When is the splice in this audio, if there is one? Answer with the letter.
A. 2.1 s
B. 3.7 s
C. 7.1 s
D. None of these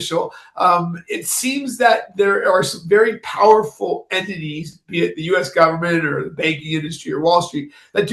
D